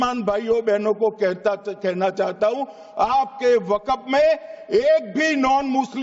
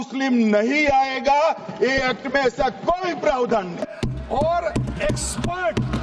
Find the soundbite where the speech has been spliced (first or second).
second